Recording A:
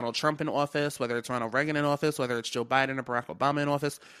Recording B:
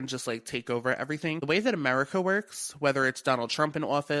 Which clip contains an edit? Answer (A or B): B